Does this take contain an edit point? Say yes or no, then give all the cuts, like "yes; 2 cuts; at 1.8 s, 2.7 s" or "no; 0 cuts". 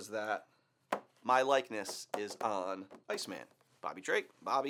no; 0 cuts